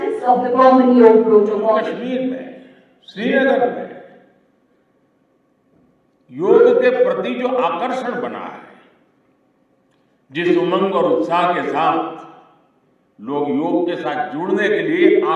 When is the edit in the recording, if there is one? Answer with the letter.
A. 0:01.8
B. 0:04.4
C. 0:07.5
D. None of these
A